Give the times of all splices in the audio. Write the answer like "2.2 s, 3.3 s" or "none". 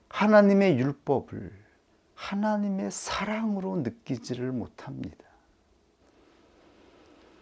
6.0 s

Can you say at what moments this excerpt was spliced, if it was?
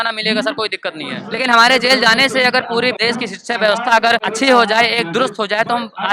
1.1 s, 3.0 s, 4.3 s

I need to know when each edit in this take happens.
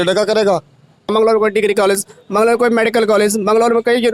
1.1 s

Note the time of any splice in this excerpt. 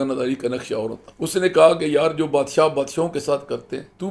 1.0 s

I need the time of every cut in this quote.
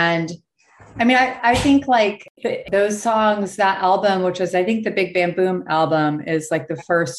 2.6 s

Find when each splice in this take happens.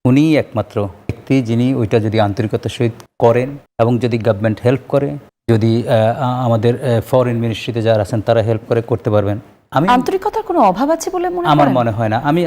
1.2 s, 3.0 s, 3.6 s, 5.3 s

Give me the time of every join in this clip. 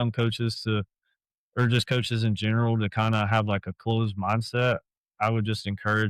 none

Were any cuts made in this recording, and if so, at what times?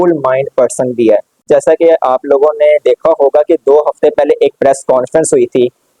1.4 s

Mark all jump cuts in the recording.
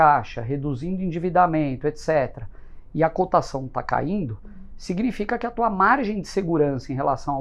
none

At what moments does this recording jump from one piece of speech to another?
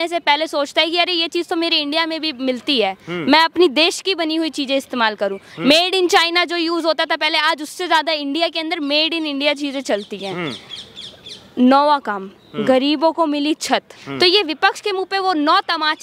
14.0 s

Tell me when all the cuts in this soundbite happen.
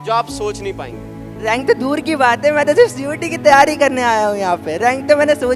1.2 s

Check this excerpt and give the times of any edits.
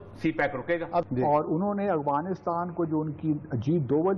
1.1 s

